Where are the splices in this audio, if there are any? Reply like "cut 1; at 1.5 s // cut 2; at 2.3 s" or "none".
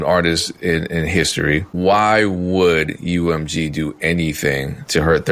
cut 1; at 1.7 s